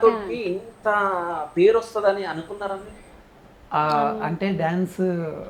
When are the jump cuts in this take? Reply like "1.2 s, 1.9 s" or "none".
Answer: none

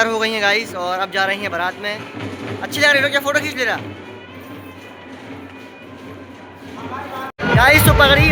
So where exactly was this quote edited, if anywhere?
none

